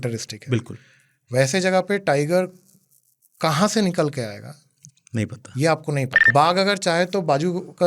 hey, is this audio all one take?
no; 1 cut; at 6.3 s

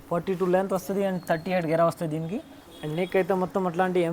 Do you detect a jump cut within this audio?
no; 0 cuts

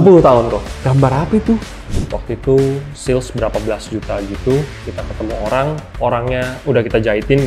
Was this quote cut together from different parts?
yes; 2 cuts; at 1.7 s, 5.9 s

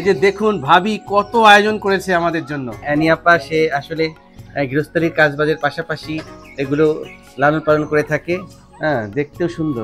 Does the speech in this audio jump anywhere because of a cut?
yes; 1 cut; at 2.7 s

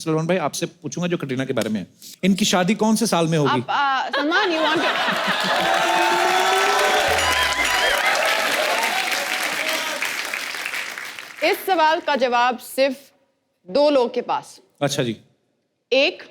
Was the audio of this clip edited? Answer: yes; 1 cut; at 2.0 s

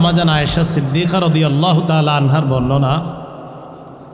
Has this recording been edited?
no; 0 cuts

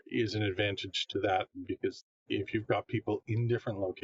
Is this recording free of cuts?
yes; 0 cuts

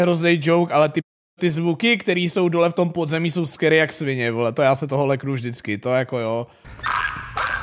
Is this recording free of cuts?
no; 1 cut; at 6.6 s

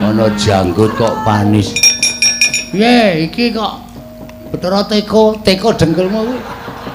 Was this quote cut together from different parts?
yes; 1 cut; at 1.8 s

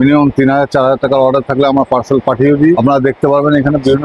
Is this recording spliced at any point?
no; 0 cuts

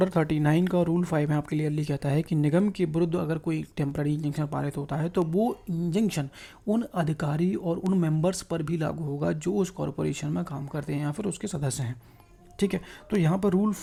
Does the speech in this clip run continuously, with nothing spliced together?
yes; 0 cuts

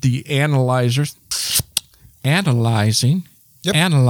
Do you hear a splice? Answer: yes; 1 cut; at 1.3 s

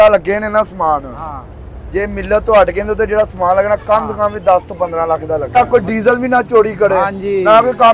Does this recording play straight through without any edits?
no; 1 cut; at 5.5 s

